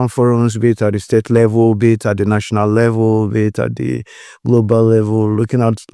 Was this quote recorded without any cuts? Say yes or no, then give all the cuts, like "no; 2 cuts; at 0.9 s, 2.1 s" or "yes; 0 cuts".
yes; 0 cuts